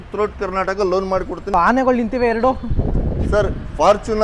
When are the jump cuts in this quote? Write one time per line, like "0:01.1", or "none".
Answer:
0:01.5